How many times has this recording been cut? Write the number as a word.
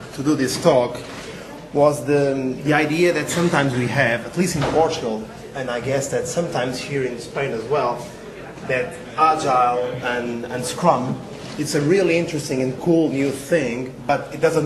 one